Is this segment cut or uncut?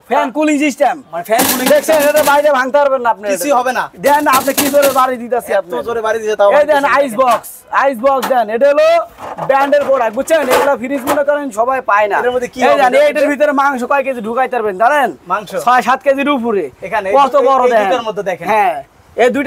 uncut